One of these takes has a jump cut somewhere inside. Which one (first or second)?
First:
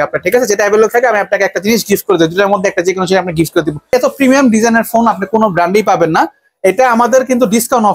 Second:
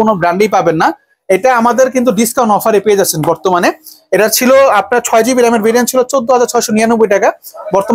first